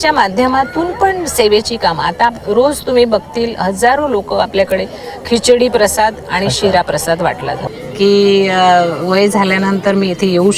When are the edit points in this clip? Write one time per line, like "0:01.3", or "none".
0:07.6